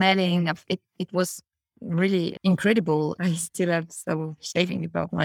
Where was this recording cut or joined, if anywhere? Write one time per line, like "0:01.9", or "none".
0:02.4
0:03.2